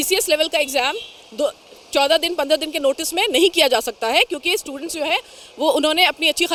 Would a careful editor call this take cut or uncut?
uncut